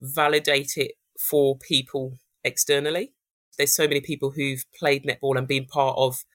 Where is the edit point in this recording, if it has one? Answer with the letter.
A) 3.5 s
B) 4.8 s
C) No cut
A